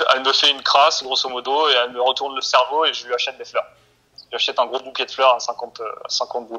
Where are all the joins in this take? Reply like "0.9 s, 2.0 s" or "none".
none